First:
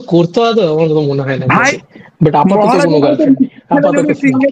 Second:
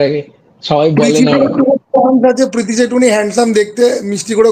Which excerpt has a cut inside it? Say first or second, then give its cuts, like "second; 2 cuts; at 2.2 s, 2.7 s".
first; 1 cut; at 1.7 s